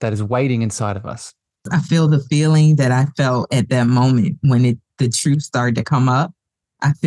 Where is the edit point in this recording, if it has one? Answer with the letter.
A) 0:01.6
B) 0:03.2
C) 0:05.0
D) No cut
A